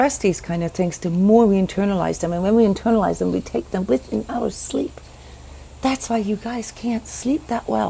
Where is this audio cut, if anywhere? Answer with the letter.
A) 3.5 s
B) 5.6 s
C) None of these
C